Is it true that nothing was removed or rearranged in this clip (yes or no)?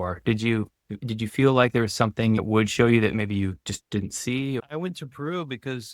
no